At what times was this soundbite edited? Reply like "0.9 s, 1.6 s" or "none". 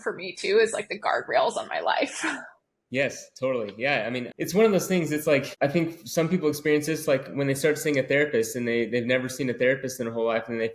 4.3 s, 5.5 s